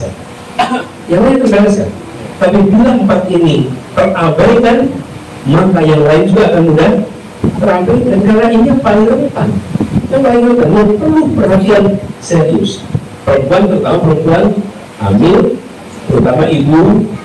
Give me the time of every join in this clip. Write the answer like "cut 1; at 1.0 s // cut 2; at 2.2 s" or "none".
none